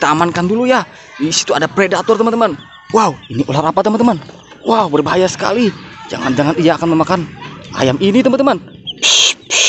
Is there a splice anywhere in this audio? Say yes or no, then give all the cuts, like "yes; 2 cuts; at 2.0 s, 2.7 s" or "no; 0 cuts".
no; 0 cuts